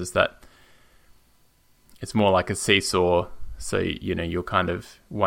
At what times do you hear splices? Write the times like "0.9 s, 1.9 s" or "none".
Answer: none